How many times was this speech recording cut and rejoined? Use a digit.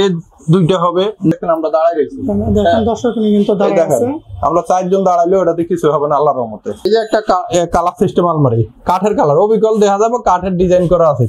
2